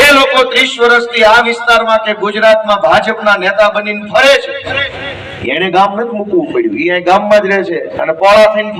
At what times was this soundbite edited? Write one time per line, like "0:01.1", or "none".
none